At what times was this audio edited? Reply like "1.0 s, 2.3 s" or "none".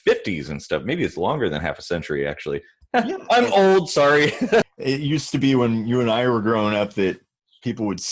4.6 s

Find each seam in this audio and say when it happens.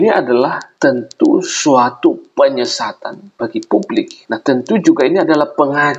4.2 s

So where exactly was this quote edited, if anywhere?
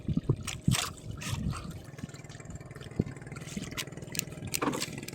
1.8 s

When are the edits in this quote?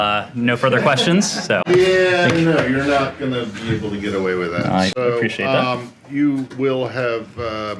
none

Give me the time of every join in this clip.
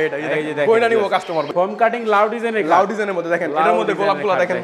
1.5 s

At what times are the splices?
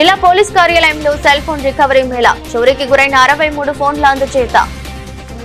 none

